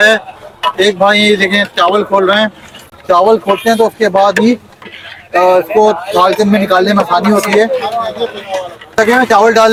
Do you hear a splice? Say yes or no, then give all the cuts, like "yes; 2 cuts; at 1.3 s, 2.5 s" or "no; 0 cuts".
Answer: no; 0 cuts